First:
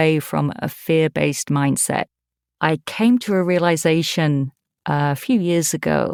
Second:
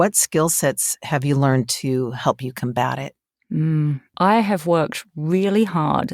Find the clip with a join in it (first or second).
second